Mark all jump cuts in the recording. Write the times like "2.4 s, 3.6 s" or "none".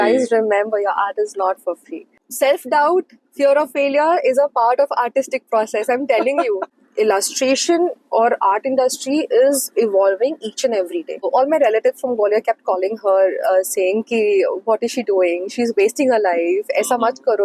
2.2 s, 6.7 s, 11.3 s

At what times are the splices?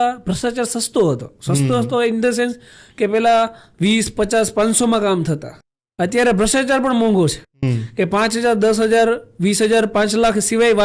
none

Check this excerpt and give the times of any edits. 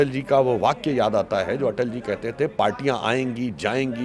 none

